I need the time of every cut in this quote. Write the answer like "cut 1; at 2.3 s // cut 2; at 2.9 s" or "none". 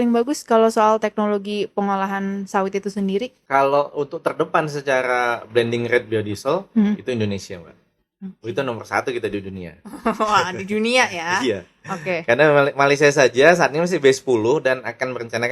none